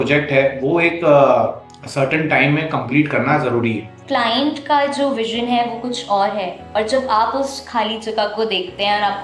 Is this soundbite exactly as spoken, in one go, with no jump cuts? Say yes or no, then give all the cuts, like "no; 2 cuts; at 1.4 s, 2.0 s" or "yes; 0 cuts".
no; 1 cut; at 4.0 s